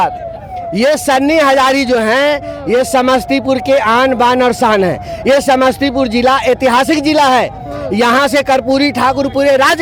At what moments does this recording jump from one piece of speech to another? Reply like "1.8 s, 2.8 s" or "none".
none